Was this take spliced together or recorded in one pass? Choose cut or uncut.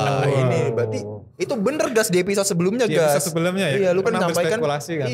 uncut